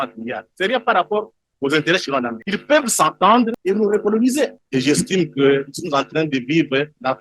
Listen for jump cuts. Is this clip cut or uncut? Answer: cut